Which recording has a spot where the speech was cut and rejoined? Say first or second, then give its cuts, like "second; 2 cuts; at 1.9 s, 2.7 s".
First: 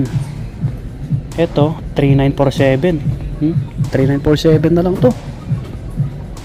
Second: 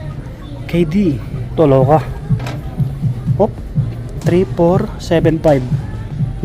second; 1 cut; at 1.4 s